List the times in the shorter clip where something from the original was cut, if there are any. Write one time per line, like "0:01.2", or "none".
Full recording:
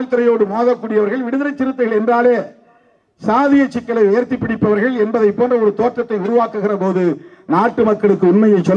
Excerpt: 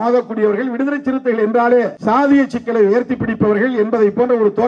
0:02.0